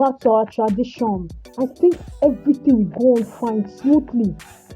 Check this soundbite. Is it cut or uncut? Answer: cut